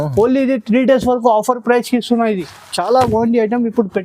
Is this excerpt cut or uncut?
cut